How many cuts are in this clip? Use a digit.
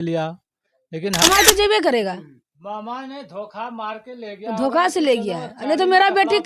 1